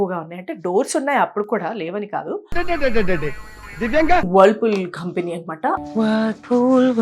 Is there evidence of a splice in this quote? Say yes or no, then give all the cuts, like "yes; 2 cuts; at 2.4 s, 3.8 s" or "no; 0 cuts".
yes; 2 cuts; at 4.3 s, 5.8 s